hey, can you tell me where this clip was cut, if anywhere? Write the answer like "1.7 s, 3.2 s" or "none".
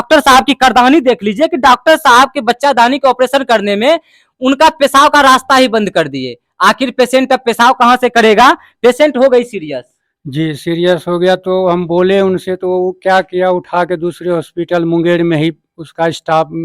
none